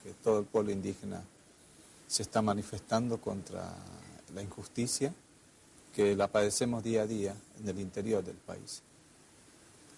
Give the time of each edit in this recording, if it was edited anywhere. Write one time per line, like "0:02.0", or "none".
0:01.1